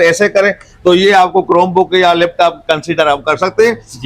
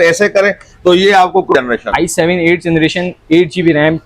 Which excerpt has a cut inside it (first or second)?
second